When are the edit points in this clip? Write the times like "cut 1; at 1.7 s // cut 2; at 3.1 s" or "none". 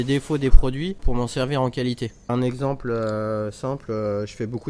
cut 1; at 1.0 s // cut 2; at 2.3 s